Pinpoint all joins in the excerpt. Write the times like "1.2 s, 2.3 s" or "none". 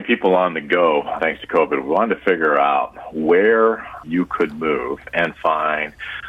1.2 s, 4.0 s